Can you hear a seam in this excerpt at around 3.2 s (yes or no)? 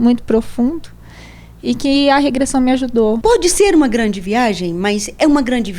yes